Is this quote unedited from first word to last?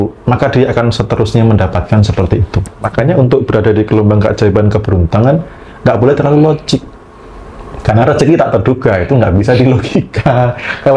no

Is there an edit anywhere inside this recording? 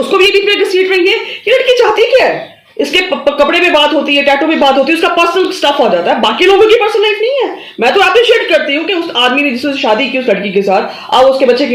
no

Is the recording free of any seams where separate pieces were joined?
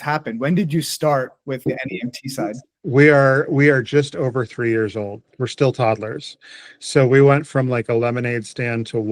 no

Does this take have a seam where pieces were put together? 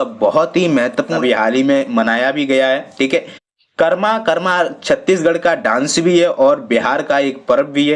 yes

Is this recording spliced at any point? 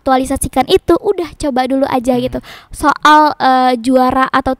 no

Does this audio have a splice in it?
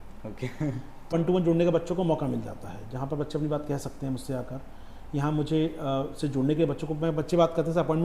yes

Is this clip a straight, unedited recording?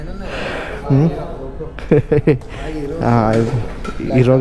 yes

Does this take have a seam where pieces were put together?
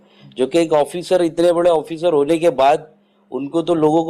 no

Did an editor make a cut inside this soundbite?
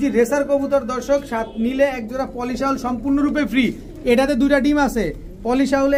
no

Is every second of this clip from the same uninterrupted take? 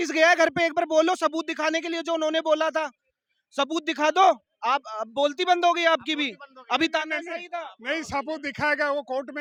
yes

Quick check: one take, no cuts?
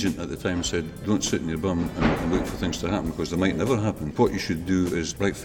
no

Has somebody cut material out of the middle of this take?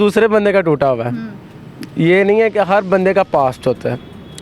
no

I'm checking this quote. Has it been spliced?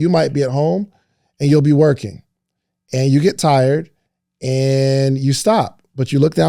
no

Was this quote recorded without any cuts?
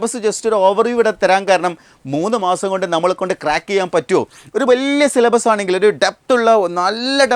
yes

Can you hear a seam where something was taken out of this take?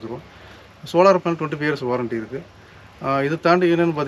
no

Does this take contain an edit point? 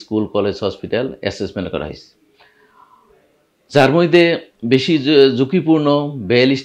no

